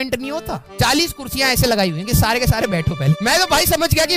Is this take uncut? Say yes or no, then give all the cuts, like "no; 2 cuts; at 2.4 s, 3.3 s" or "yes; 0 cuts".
no; 1 cut; at 3.2 s